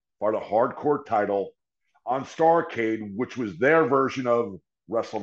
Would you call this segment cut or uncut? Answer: uncut